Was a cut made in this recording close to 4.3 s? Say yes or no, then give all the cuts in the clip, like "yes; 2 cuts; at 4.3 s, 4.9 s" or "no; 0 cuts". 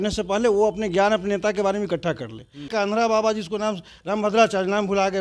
no; 1 cut; at 2.7 s